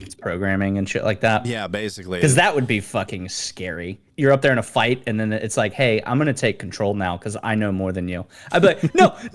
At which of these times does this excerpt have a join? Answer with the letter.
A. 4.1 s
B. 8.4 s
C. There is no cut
A